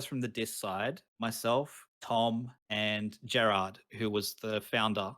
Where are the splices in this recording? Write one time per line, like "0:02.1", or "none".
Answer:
0:01.1
0:01.9
0:02.6